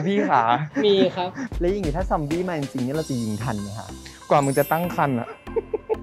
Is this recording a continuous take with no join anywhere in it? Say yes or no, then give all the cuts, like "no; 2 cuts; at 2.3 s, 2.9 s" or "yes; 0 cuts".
no; 1 cut; at 1.4 s